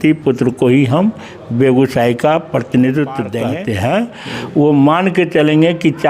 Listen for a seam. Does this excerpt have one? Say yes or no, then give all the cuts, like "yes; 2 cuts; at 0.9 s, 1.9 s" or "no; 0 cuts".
yes; 1 cut; at 3.5 s